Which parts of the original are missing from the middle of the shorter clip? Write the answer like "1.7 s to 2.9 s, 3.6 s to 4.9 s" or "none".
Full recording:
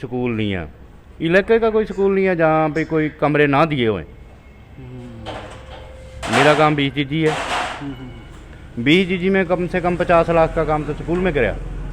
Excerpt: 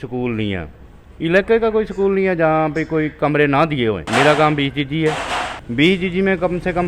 4.0 s to 6.2 s, 7.8 s to 8.6 s